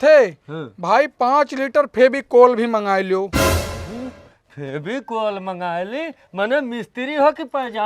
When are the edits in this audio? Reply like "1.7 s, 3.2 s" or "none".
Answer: none